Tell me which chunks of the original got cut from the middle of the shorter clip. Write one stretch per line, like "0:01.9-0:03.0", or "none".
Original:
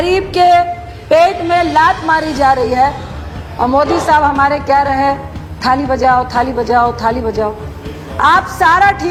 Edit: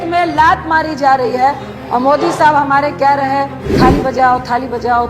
0:03.1-0:03.4
0:05.3-0:05.5